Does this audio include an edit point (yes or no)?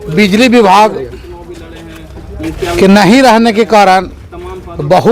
no